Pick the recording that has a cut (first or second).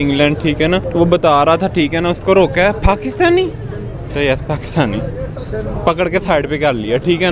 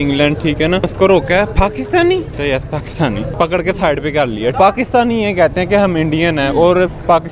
second